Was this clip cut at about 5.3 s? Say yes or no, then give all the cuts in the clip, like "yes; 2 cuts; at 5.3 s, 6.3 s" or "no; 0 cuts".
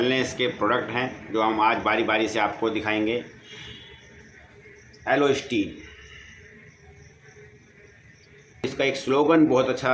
no; 1 cut; at 8.7 s